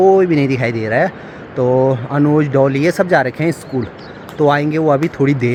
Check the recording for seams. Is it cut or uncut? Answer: uncut